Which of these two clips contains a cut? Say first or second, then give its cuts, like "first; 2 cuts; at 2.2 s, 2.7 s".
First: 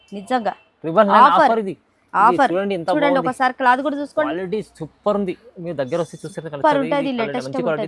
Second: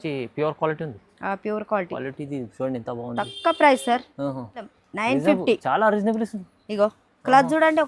second; 1 cut; at 4.7 s